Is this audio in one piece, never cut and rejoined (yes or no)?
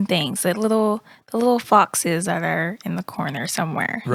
yes